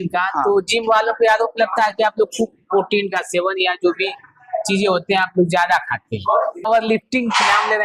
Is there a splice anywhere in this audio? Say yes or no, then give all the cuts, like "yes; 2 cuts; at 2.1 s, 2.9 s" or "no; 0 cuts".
yes; 1 cut; at 6.6 s